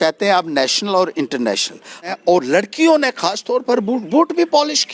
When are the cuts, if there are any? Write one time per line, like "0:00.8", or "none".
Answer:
0:02.1